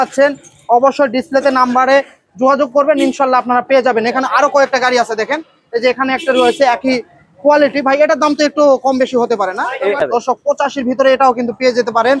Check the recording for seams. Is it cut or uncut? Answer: cut